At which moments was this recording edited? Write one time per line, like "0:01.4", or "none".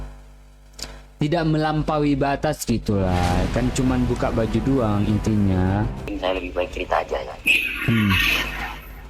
0:06.0